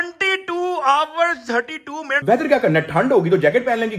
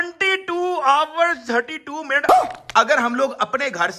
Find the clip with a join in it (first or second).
first